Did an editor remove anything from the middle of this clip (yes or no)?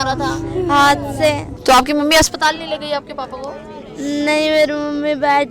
yes